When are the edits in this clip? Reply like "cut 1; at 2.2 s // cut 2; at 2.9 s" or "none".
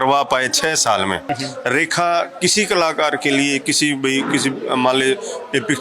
cut 1; at 1.2 s